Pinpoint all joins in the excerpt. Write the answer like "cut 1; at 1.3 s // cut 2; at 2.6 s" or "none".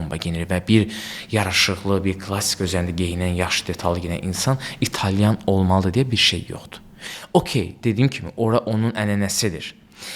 none